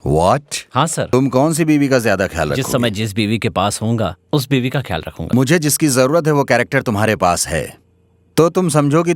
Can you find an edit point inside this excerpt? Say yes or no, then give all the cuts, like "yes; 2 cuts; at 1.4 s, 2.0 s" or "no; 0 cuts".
yes; 2 cuts; at 1.1 s, 5.3 s